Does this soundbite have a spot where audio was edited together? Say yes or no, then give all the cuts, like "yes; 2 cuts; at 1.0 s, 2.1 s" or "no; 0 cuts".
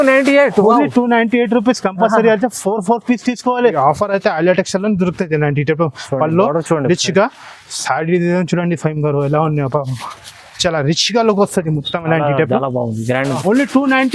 yes; 2 cuts; at 3.8 s, 13.3 s